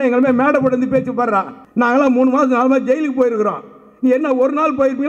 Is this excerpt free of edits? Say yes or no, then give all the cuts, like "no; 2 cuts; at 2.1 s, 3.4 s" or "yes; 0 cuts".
no; 1 cut; at 1.6 s